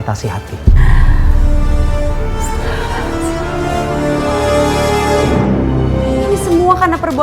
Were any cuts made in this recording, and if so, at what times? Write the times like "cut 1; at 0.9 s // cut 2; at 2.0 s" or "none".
cut 1; at 6.2 s